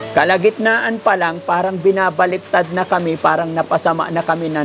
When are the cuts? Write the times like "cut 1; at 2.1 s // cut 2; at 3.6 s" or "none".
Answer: none